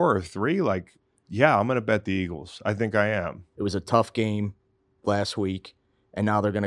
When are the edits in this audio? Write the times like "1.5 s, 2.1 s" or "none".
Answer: 3.4 s